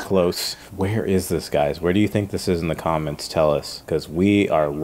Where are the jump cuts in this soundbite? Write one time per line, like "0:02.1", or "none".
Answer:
0:03.7